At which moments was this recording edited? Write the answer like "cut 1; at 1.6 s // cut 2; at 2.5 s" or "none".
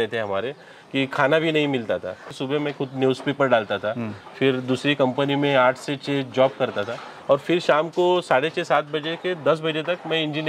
cut 1; at 2.2 s